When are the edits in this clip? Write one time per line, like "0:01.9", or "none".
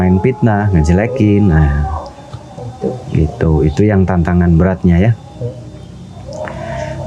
none